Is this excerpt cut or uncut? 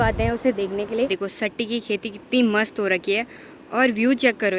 cut